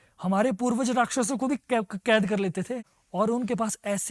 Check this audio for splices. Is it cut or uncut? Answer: cut